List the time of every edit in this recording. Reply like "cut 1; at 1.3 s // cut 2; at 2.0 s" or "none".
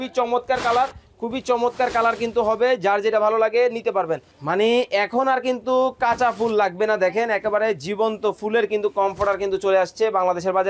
cut 1; at 4.3 s